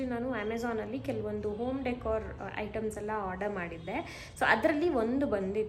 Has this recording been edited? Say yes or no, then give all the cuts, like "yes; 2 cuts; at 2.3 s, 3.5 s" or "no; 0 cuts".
no; 0 cuts